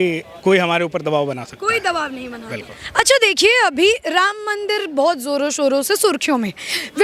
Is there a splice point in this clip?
no; 0 cuts

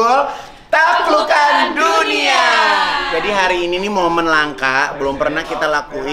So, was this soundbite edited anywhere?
yes; 1 cut; at 3.1 s

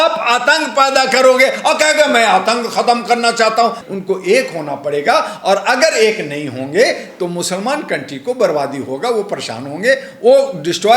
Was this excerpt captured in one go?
no; 1 cut; at 3.8 s

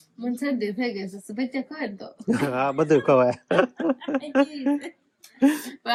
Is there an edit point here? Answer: no; 0 cuts

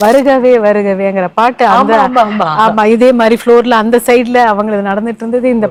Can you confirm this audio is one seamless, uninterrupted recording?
yes; 0 cuts

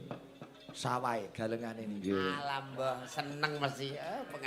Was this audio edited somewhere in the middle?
yes; 1 cut; at 1.8 s

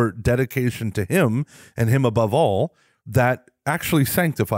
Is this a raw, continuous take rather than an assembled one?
yes; 0 cuts

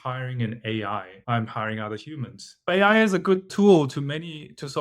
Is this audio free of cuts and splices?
no; 3 cuts; at 1.1 s, 2.7 s, 3.5 s

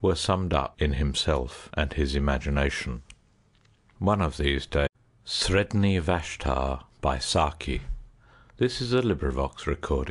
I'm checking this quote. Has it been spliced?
no; 0 cuts

